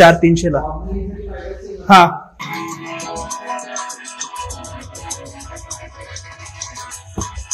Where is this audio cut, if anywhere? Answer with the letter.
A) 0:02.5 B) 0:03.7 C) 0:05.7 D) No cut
A